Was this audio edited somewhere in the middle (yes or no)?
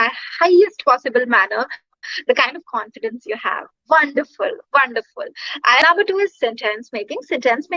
yes